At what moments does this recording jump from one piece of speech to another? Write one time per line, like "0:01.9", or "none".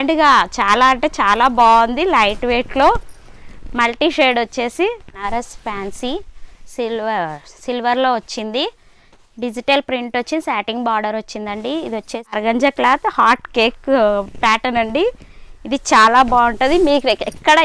0:05.2
0:12.4